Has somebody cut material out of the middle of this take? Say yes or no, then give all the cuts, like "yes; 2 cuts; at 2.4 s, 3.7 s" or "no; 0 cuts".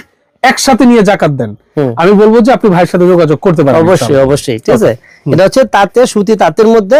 no; 0 cuts